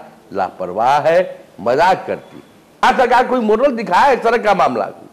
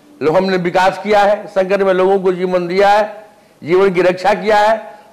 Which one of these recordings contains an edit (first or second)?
first